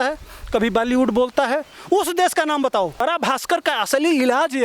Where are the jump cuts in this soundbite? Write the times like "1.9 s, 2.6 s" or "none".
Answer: 3.0 s